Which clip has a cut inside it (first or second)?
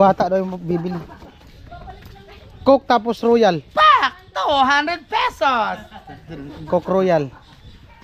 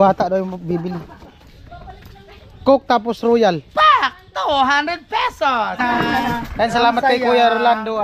second